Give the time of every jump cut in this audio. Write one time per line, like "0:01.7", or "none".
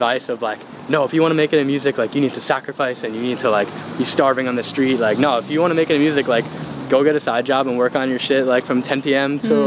none